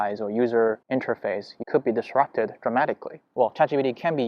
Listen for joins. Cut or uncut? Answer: cut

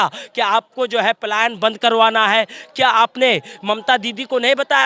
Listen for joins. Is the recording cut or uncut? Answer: uncut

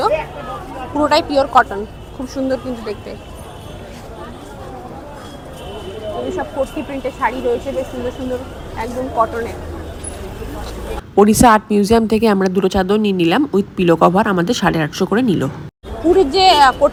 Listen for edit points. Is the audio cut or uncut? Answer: uncut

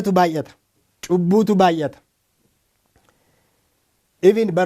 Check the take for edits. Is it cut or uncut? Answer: uncut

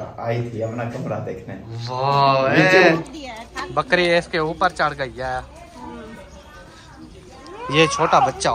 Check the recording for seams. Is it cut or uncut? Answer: cut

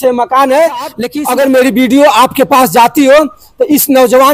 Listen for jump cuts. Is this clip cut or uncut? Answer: cut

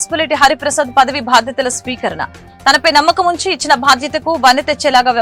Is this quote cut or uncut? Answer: uncut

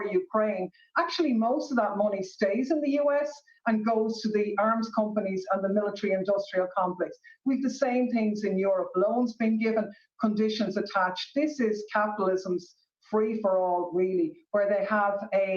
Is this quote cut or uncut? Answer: cut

